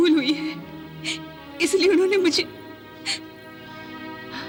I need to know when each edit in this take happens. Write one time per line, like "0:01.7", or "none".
none